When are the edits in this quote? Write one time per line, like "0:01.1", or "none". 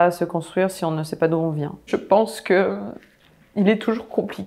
0:01.8